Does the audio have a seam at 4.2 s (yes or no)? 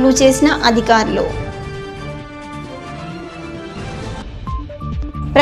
no